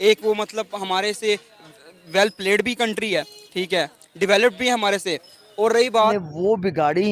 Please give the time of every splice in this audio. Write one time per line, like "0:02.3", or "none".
0:06.1